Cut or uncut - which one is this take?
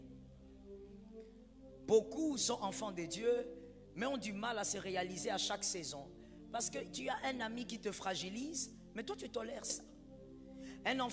uncut